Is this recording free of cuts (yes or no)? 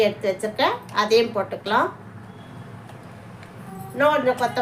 no